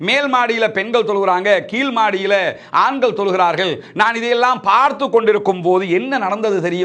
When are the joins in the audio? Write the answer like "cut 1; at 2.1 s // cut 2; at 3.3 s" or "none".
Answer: none